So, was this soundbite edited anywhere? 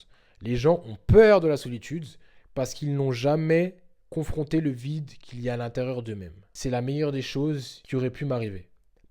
yes; 2 cuts; at 6.5 s, 7.7 s

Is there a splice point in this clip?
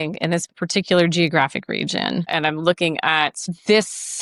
no; 0 cuts

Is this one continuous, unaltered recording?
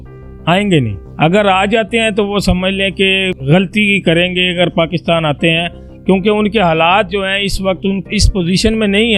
no; 2 cuts; at 1.0 s, 3.4 s

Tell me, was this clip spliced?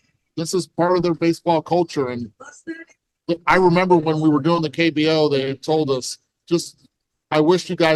no; 0 cuts

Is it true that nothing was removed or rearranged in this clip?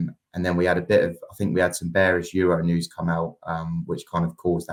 yes; 0 cuts

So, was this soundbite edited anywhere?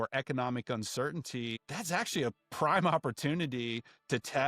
yes; 1 cut; at 1.7 s

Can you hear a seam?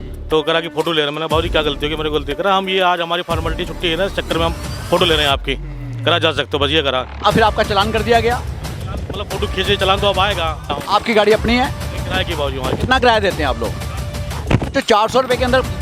yes; 1 cut; at 10.7 s

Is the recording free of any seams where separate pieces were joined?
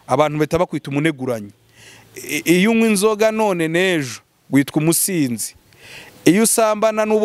yes; 0 cuts

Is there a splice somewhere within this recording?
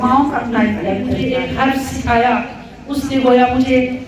yes; 1 cut; at 1.2 s

